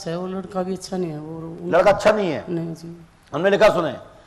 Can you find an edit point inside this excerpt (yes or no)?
no